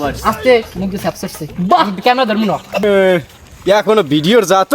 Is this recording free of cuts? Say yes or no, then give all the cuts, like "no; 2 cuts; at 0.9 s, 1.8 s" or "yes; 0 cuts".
no; 1 cut; at 2.8 s